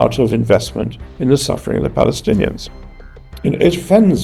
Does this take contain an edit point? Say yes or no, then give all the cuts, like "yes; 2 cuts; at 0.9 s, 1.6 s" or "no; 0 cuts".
no; 0 cuts